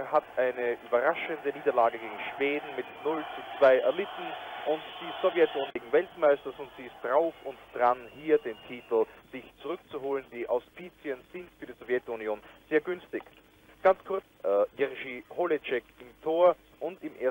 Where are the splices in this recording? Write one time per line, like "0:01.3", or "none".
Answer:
0:05.7
0:14.3